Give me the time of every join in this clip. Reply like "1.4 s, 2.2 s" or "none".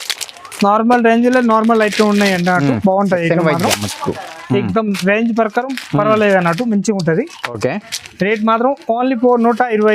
none